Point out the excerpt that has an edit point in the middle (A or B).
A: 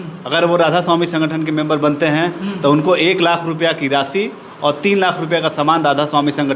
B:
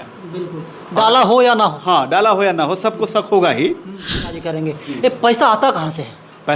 B